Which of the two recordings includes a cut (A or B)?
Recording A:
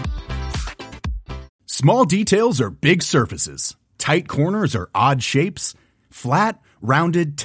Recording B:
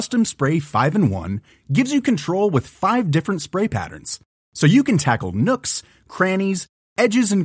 A